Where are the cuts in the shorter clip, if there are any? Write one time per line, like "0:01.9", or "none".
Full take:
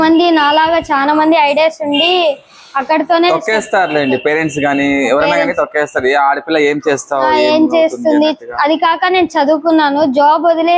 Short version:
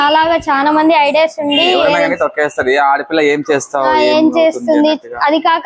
0:01.8